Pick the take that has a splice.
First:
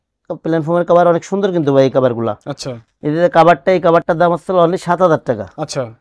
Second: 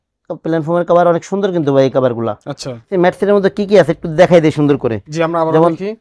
second; 1 cut; at 2.9 s

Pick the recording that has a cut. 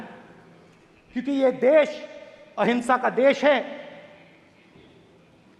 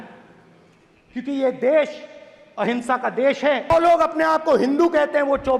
second; 1 cut; at 3.7 s

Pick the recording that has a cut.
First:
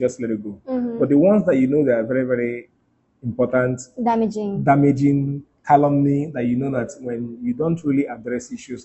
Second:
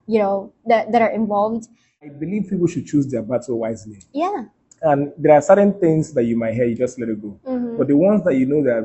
second; 1 cut; at 2.1 s

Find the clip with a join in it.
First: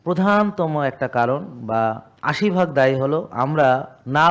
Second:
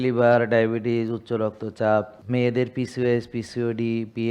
second; 1 cut; at 2.2 s

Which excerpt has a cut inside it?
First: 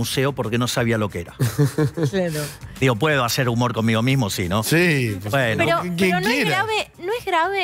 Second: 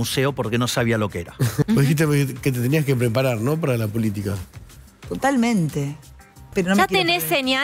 second; 2 cuts; at 1.6 s, 6.5 s

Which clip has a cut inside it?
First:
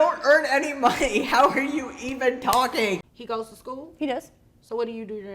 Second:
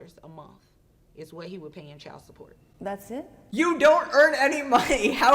first; 1 cut; at 3.1 s

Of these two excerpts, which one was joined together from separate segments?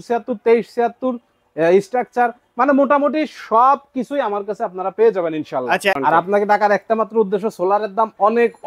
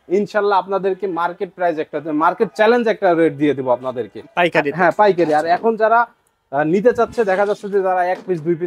first; 1 cut; at 6.0 s

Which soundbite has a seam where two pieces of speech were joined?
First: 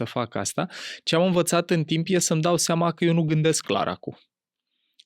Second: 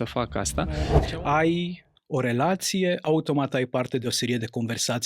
second; 1 cut; at 1.0 s

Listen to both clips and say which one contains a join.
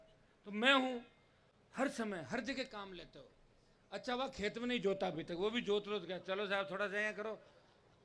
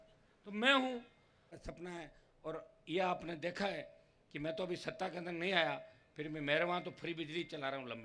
second; 1 cut; at 1.5 s

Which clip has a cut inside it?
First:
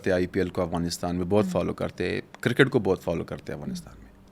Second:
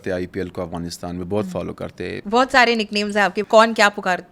second; 2 cuts; at 2.2 s, 3.4 s

